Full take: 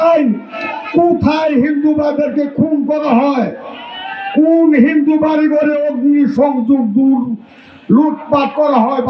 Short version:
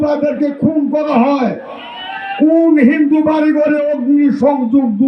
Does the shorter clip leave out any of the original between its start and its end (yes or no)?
no